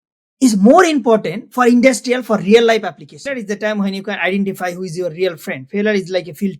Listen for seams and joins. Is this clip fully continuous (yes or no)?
no